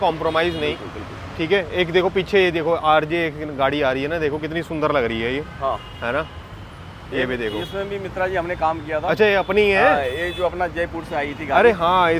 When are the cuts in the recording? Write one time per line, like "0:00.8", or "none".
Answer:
none